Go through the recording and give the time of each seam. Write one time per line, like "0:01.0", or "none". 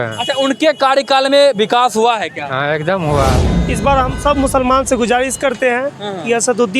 0:03.4